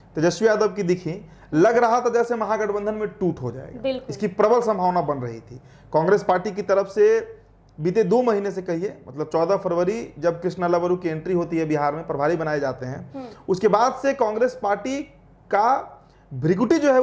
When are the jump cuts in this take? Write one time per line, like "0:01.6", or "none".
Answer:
none